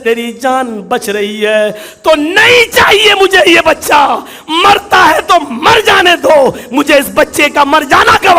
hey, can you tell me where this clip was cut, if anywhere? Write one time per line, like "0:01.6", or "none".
none